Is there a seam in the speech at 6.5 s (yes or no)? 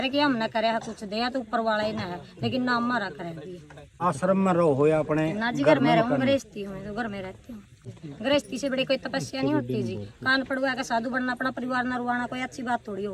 no